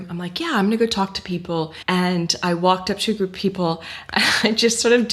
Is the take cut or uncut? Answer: cut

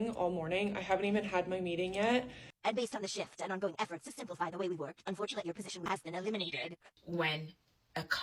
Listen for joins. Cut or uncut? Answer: cut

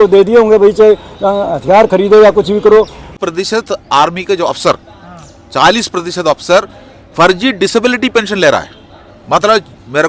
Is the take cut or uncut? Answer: cut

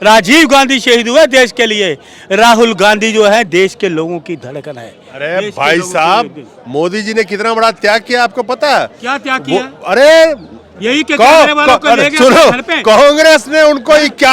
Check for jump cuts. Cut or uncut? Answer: uncut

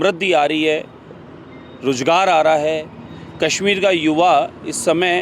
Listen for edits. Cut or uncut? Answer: uncut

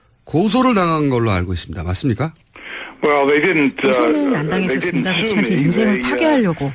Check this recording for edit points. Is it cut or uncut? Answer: cut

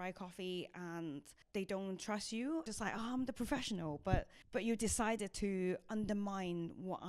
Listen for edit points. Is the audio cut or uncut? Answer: cut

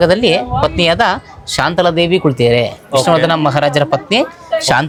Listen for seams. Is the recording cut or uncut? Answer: uncut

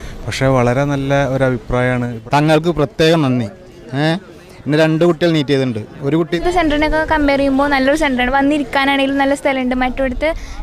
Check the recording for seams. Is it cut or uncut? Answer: cut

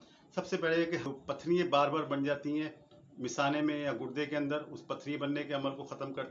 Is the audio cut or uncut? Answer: cut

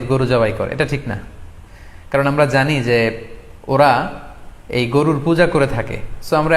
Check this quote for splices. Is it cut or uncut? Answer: uncut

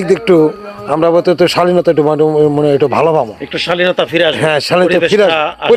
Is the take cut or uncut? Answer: uncut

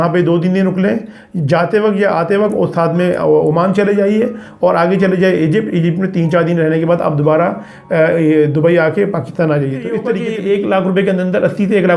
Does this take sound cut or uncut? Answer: cut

